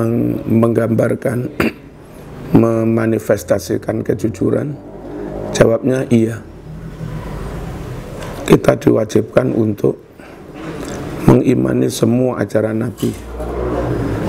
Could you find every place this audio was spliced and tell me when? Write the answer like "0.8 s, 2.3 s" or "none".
7.9 s